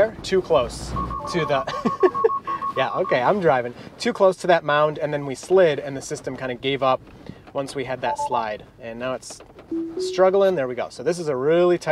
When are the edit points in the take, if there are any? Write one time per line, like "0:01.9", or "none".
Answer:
none